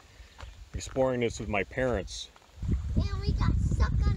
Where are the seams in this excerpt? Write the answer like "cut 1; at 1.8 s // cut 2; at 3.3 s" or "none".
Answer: cut 1; at 2.6 s